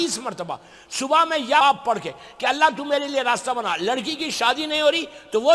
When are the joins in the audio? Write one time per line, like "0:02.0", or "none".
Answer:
0:01.6